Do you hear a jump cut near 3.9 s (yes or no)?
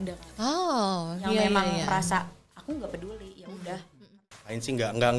yes